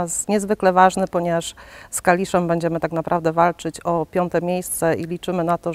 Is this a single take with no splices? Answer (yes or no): yes